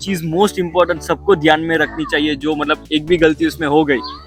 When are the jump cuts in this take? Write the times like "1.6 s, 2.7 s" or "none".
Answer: none